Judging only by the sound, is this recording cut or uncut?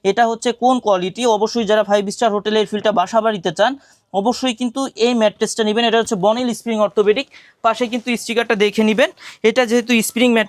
uncut